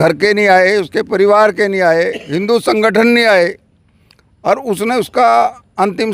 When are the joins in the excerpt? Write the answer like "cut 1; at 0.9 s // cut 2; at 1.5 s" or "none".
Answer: none